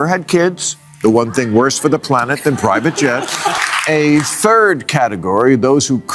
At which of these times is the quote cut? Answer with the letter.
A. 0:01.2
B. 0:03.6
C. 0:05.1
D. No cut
B